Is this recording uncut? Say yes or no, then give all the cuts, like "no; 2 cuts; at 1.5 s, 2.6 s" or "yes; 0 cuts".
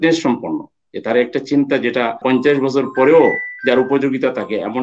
yes; 0 cuts